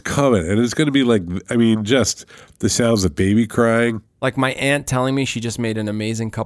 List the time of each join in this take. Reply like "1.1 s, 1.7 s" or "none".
4.1 s